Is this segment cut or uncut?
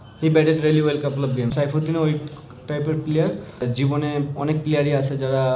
cut